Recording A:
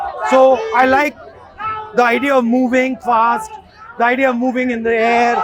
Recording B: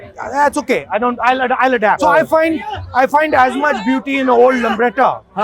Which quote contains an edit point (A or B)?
B